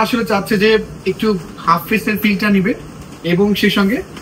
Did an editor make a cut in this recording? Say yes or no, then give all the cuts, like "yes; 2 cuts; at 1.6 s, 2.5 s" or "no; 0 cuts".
no; 0 cuts